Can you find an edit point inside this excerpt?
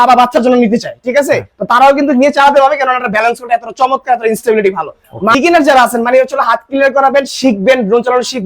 yes; 1 cut; at 5.3 s

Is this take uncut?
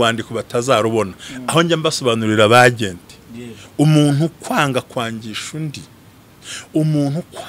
yes; 0 cuts

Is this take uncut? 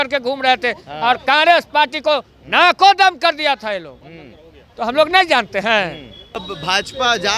no; 1 cut; at 6.5 s

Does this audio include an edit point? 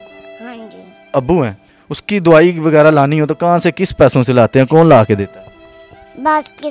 yes; 1 cut; at 1.1 s

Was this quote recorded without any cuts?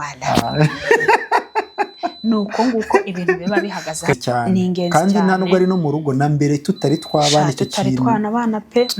no; 1 cut; at 4.2 s

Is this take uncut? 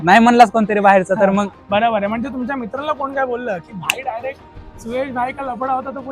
no; 2 cuts; at 1.6 s, 4.7 s

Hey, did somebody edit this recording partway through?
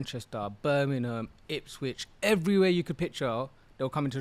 no; 0 cuts

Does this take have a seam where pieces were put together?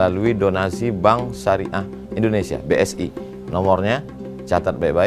no; 0 cuts

